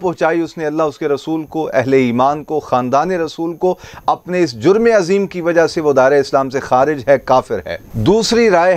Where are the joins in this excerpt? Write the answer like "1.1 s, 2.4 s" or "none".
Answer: none

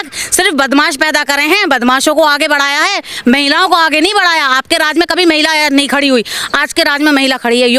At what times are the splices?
none

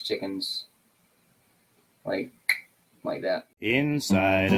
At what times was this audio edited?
3.5 s

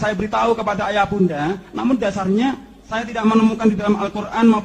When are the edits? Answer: none

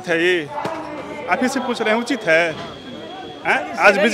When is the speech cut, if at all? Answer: none

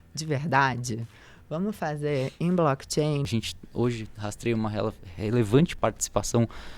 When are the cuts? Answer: 3.2 s, 5.7 s

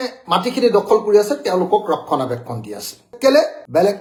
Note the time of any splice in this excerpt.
none

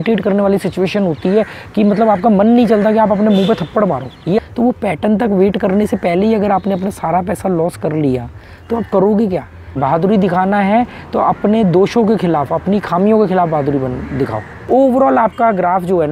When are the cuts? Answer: 4.4 s, 9.8 s, 14.5 s

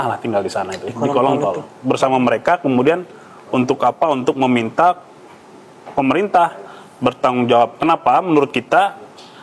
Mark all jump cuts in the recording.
none

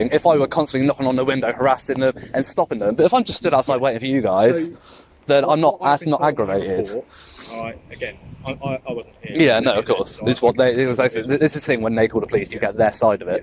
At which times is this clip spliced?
none

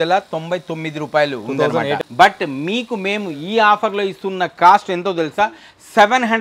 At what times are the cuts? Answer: 2.0 s

